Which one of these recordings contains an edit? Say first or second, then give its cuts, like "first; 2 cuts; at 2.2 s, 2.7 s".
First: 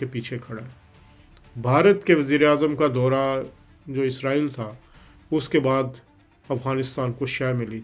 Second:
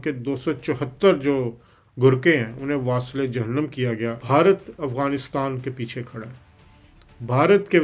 second; 1 cut; at 4.2 s